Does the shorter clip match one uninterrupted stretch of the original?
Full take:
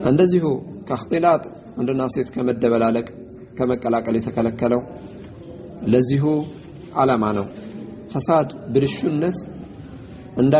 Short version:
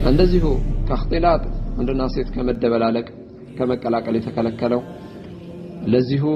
yes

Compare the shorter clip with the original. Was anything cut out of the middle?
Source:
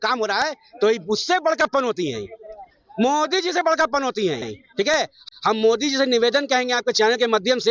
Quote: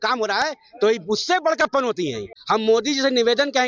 yes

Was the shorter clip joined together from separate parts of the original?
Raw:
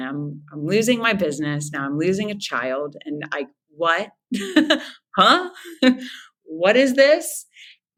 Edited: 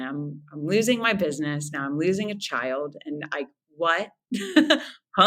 no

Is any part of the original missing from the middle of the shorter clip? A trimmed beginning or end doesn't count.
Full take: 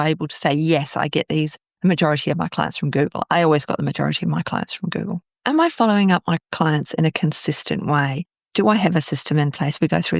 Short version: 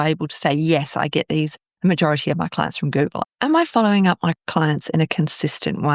yes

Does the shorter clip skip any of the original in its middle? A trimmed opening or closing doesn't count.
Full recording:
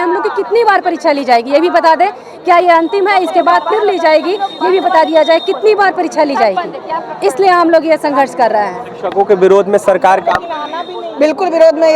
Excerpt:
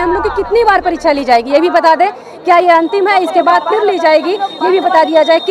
no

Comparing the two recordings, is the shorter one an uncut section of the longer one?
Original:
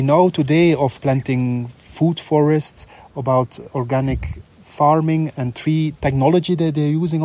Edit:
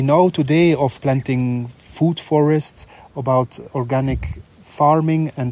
yes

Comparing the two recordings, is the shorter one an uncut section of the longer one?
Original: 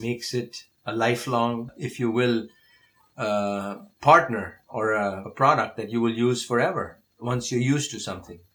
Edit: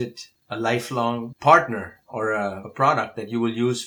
no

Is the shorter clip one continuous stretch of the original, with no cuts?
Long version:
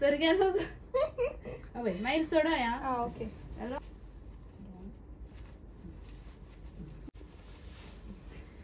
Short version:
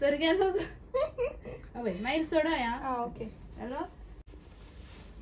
no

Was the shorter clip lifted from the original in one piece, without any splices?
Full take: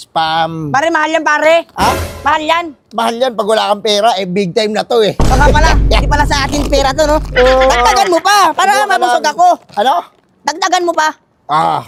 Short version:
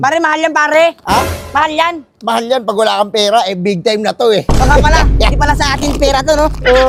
yes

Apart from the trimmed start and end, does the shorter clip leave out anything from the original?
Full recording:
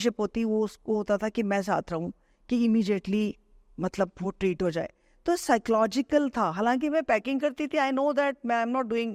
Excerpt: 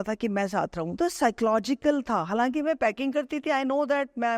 yes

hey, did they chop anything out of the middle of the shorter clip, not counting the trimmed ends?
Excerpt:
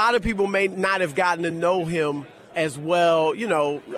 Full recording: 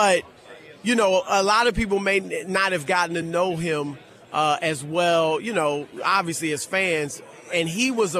yes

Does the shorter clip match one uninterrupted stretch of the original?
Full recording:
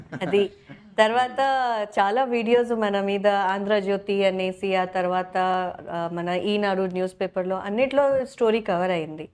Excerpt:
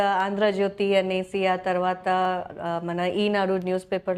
yes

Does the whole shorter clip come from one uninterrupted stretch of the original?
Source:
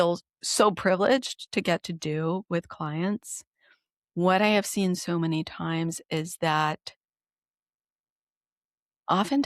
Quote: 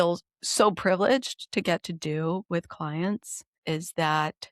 no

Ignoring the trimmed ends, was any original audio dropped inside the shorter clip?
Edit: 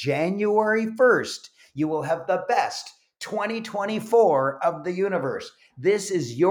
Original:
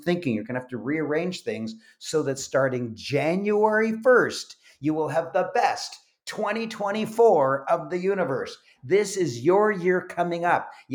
no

